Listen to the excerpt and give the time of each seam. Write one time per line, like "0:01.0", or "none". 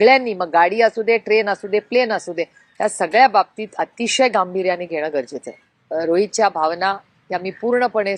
0:05.7

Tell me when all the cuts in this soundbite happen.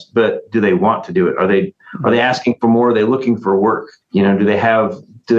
none

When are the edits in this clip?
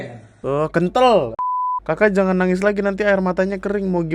0:01.5

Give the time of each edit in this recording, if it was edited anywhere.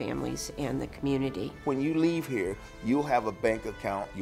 0:01.5

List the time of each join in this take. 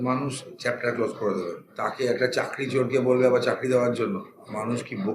0:01.6

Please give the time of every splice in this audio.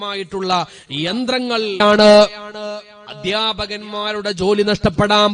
0:01.8

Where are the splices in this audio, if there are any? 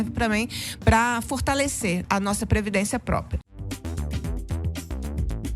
0:02.0
0:03.6

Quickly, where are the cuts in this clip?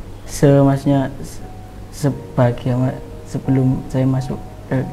none

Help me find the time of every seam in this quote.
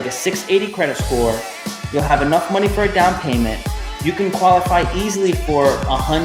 none

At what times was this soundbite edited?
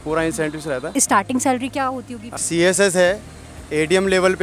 0:00.9
0:02.3

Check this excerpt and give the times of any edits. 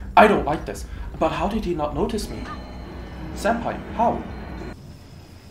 0:04.4

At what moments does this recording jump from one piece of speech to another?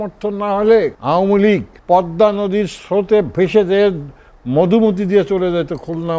0:01.0
0:01.7

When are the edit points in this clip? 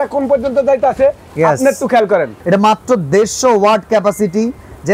0:02.3

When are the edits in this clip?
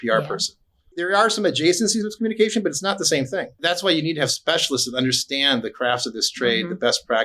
0:01.0
0:03.6

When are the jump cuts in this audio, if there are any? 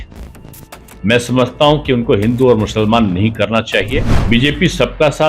0:04.1

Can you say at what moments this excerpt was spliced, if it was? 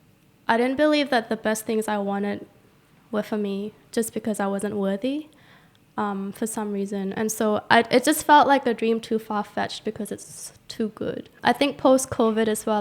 0:11.3

